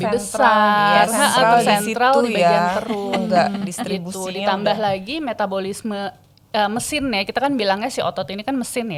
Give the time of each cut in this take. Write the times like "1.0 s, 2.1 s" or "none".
none